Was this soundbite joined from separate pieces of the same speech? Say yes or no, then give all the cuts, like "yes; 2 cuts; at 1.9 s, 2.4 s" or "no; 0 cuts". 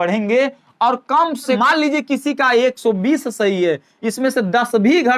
yes; 1 cut; at 1.6 s